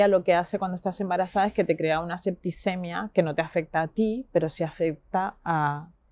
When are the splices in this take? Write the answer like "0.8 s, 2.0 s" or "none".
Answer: none